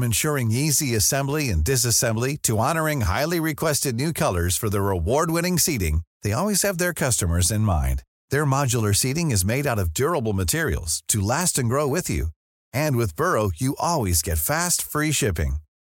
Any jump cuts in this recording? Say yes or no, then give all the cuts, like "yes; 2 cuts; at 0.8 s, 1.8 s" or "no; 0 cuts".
no; 0 cuts